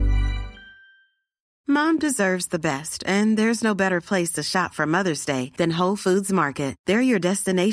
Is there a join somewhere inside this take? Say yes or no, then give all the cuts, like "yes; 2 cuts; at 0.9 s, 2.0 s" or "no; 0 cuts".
yes; 1 cut; at 1.5 s